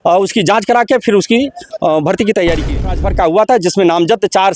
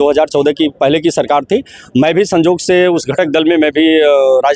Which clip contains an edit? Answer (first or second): first